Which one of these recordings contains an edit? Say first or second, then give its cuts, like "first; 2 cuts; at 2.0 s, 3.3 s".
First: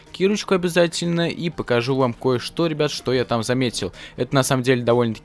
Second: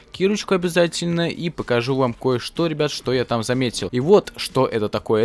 second; 1 cut; at 3.8 s